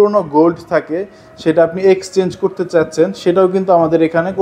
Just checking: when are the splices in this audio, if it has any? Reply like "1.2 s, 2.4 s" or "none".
none